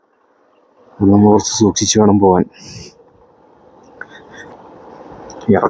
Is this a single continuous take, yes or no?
no